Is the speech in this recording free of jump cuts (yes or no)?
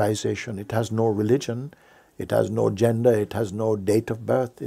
yes